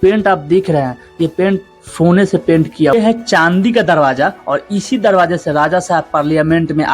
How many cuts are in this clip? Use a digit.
1